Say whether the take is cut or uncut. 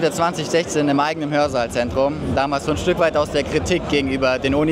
uncut